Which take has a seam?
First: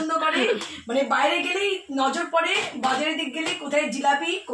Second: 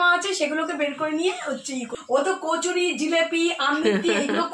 second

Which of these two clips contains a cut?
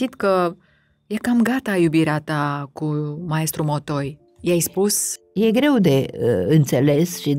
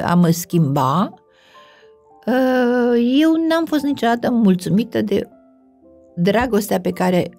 first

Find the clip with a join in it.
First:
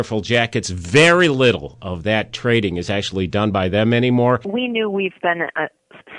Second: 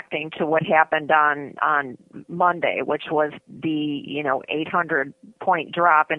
first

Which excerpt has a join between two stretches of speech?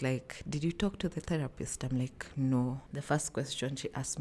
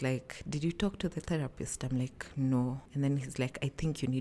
first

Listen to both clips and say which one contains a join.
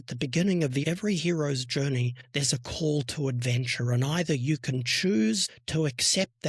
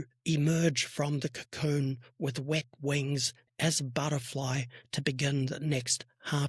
first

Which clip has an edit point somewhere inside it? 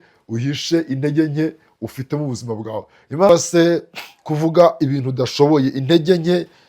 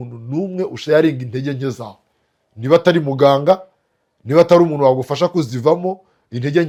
first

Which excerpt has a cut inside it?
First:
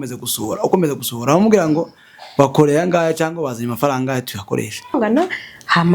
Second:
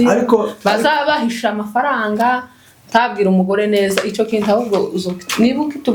first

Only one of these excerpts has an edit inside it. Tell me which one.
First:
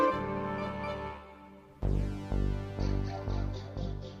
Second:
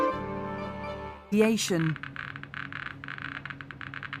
first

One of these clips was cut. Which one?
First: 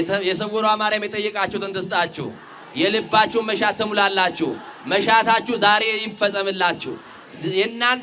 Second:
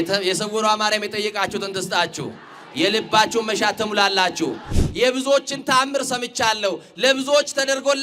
second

